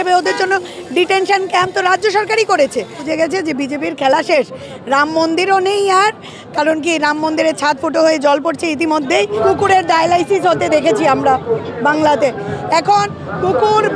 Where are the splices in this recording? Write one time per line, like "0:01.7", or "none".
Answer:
0:03.0
0:09.4